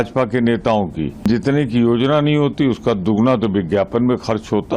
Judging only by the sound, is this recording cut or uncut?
cut